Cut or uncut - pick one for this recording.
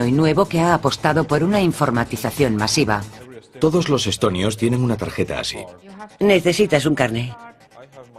uncut